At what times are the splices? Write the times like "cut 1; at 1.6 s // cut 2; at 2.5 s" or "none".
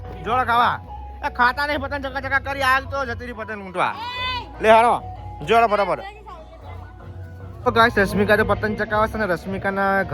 cut 1; at 7.5 s